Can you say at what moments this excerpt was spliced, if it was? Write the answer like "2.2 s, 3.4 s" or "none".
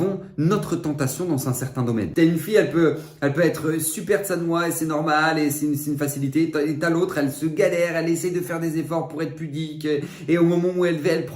2.1 s